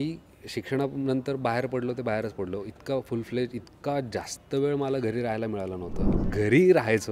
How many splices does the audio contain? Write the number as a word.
one